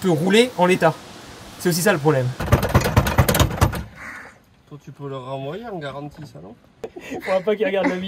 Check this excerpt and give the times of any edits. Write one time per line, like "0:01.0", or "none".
0:02.4
0:07.0